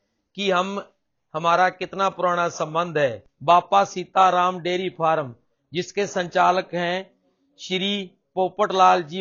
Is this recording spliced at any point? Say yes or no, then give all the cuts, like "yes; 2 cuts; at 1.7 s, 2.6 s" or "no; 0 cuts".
yes; 1 cut; at 3.3 s